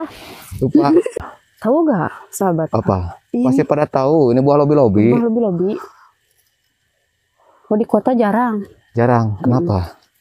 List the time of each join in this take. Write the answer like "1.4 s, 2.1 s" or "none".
1.3 s